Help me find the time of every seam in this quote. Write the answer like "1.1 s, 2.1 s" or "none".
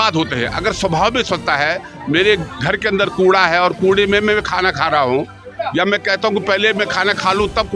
none